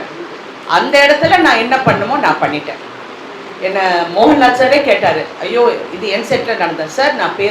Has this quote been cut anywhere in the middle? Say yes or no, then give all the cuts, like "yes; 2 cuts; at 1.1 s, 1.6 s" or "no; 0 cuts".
no; 0 cuts